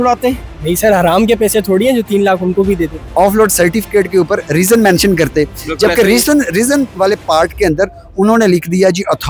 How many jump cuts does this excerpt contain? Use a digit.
1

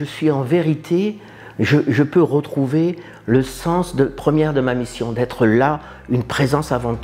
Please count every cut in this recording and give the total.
0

